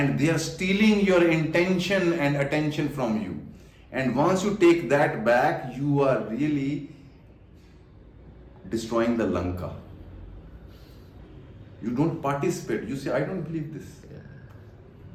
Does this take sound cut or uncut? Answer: uncut